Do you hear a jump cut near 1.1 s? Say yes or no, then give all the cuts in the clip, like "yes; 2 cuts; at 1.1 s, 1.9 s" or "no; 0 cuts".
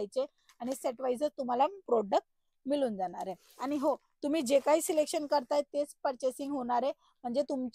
no; 0 cuts